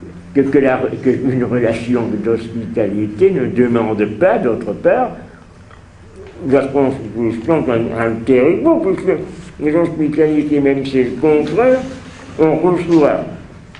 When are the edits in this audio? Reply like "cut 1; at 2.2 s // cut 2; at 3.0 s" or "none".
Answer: cut 1; at 3.4 s